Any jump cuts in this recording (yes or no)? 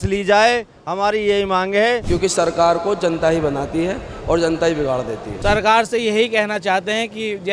yes